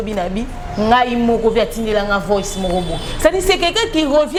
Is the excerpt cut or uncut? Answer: uncut